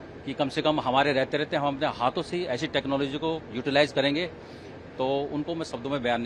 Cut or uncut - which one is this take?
uncut